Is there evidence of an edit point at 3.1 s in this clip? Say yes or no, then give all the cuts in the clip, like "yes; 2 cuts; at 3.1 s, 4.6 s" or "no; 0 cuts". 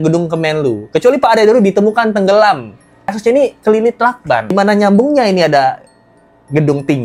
yes; 2 cuts; at 3.1 s, 4.5 s